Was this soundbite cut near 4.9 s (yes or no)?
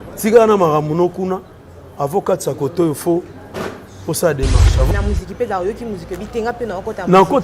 yes